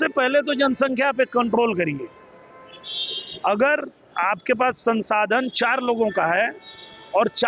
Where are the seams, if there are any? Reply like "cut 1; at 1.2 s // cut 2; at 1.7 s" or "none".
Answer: none